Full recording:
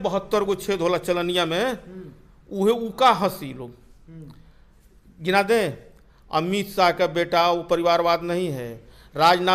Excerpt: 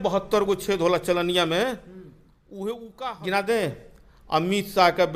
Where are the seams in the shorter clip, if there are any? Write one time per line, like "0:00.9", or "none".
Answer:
0:02.9

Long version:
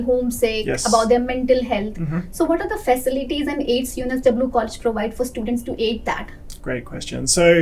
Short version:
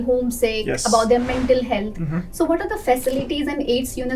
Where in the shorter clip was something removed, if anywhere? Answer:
none

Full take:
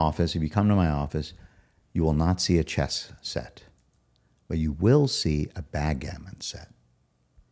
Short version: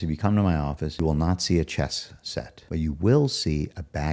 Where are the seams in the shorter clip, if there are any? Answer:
0:00.9
0:02.6

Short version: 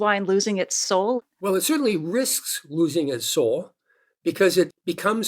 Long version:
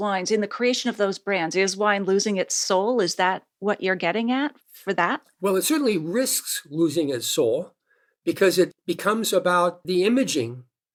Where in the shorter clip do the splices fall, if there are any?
0:01.2

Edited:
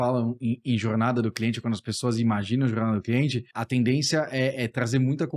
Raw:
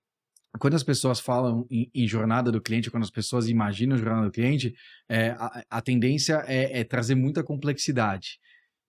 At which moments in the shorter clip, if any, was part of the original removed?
0:03.5

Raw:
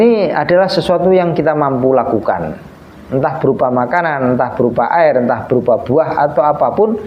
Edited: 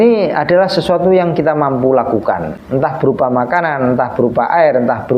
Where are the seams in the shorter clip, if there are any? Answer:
0:02.5

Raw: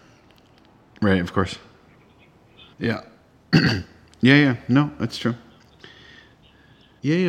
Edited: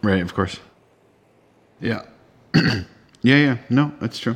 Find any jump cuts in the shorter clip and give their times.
none

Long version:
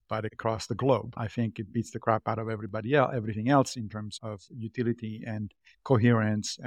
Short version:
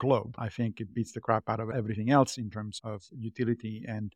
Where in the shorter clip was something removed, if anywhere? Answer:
0:01.7

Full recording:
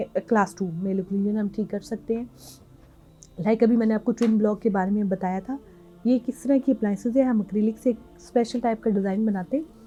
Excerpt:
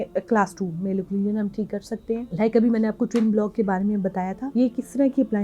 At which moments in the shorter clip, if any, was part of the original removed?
0:02.3
0:04.4

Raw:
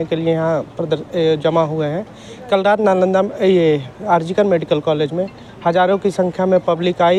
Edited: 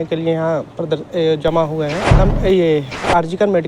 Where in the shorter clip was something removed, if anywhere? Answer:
0:02.2

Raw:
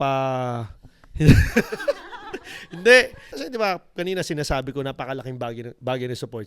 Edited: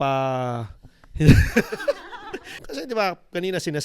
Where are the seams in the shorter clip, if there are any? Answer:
0:02.6

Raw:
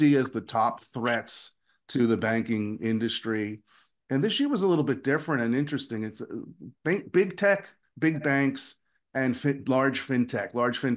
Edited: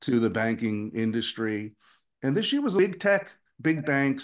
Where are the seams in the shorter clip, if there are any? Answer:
0:02.8

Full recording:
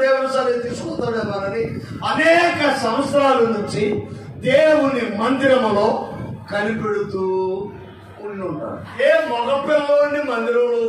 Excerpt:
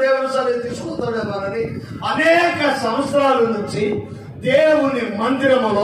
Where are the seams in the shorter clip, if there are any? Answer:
none

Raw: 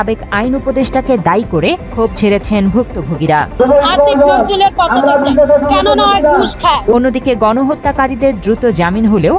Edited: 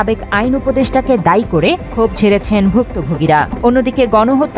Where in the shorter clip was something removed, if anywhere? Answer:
0:03.5

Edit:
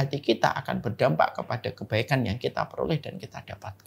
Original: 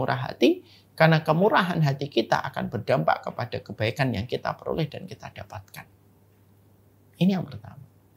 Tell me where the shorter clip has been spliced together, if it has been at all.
none

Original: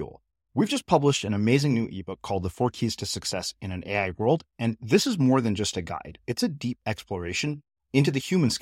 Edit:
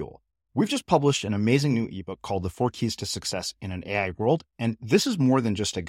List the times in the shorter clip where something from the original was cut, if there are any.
none

